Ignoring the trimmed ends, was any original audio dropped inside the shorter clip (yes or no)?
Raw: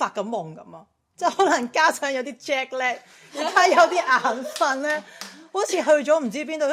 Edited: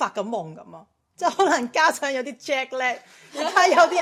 no